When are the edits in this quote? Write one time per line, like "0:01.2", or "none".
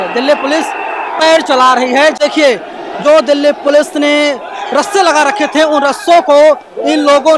0:02.2